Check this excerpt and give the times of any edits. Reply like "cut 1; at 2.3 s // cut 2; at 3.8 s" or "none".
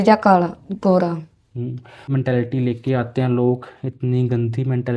cut 1; at 2.1 s